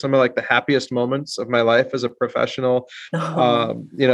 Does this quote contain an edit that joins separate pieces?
no; 0 cuts

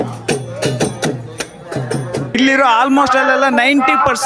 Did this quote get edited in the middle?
yes; 1 cut; at 2.4 s

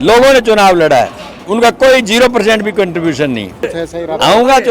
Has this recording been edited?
yes; 1 cut; at 3.7 s

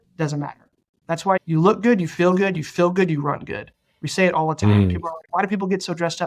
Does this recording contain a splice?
yes; 1 cut; at 1.4 s

